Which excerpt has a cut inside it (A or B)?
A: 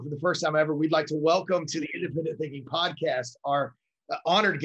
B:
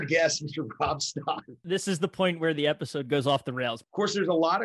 B